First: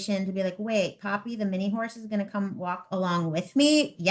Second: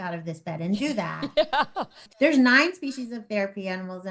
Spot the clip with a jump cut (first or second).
second